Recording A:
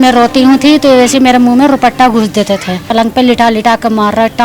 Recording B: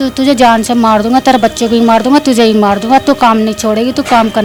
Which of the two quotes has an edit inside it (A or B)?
A